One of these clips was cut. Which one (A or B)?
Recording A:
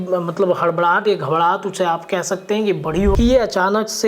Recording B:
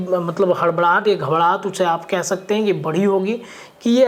A